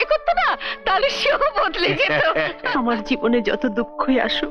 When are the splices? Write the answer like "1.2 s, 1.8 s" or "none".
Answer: 2.6 s